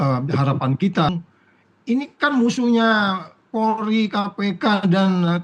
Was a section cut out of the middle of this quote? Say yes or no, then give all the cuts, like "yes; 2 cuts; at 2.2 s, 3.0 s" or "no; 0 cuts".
yes; 1 cut; at 1.1 s